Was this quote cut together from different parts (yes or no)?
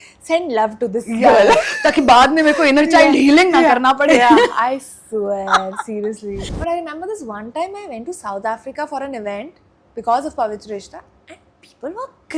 yes